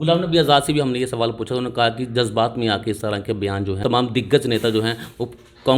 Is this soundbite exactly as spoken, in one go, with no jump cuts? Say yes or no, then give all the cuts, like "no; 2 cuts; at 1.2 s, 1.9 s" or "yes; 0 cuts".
no; 1 cut; at 3.8 s